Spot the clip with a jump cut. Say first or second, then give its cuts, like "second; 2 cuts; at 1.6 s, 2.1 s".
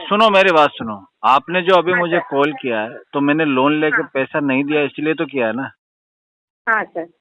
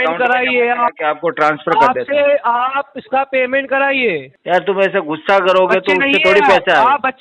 second; 1 cut; at 4.3 s